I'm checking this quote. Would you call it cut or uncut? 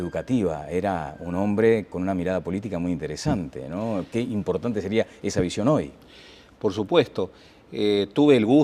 cut